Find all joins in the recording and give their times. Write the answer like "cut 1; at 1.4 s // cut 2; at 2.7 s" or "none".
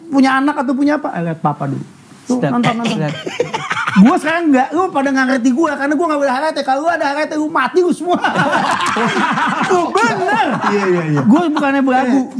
none